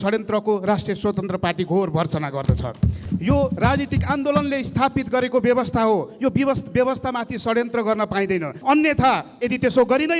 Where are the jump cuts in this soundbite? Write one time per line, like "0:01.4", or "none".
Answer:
0:03.0
0:08.6

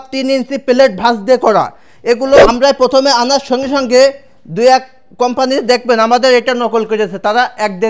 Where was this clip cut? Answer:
0:02.4

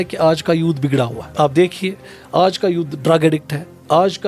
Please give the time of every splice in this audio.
0:01.2

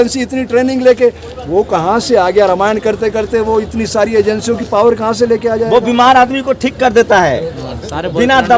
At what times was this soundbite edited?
none

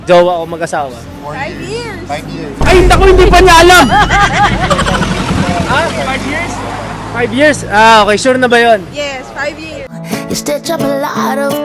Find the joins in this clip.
none

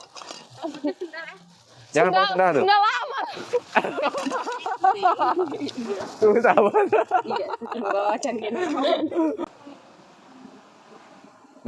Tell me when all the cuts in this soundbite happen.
0:09.4

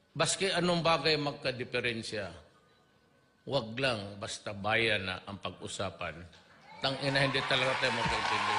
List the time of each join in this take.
none

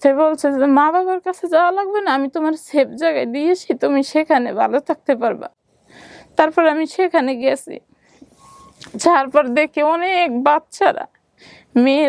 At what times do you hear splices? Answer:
none

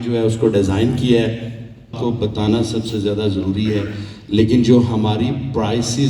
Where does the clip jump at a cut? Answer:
0:01.9

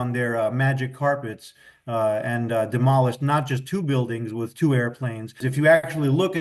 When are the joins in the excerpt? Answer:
0:05.4

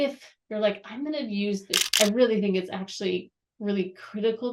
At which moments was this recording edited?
0:01.8

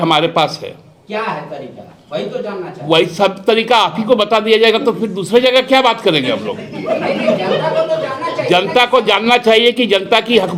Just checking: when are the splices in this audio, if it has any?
none

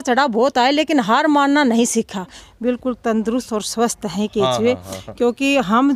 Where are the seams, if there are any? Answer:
0:02.4

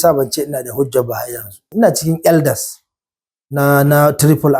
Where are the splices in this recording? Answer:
0:01.6

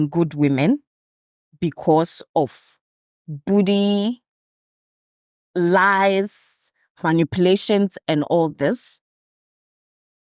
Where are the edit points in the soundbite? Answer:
none

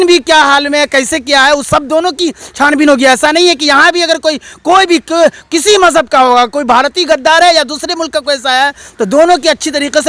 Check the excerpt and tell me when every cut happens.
none

